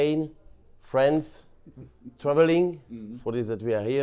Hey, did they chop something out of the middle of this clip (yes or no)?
no